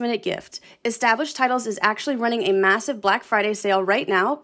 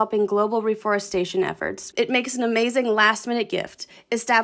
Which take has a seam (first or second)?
second